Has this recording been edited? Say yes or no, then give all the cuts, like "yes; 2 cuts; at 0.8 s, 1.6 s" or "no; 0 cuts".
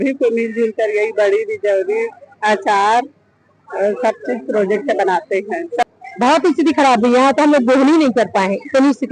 yes; 1 cut; at 5.8 s